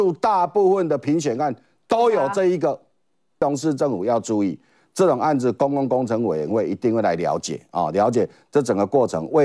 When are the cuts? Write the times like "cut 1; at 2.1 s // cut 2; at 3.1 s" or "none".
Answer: cut 1; at 3.4 s